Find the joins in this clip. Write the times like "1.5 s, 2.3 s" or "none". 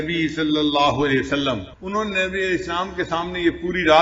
1.7 s

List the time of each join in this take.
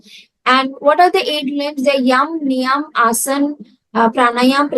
none

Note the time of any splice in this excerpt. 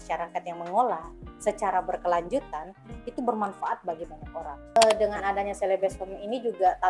4.8 s

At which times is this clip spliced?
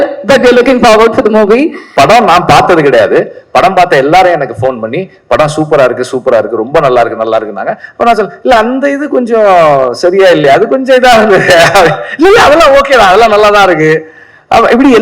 1.9 s

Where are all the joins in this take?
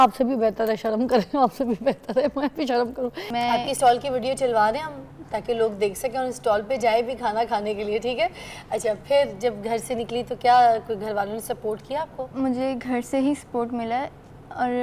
3.2 s

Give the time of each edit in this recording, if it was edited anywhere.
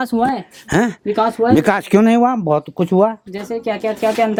none

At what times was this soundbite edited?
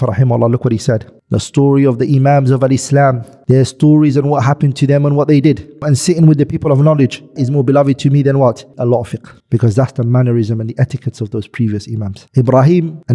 none

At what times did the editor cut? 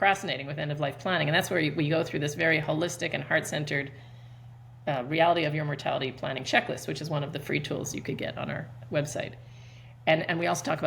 none

